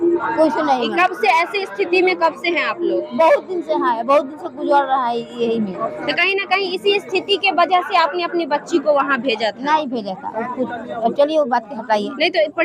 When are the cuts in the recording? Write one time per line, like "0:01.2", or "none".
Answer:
none